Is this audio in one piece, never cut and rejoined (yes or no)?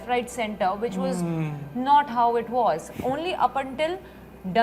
yes